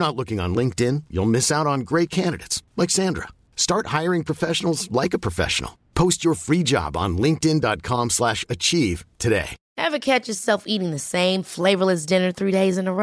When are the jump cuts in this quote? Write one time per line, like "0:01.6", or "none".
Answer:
0:09.6